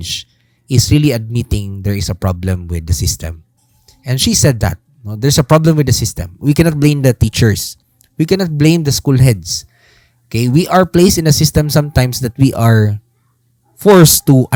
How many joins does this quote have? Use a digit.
0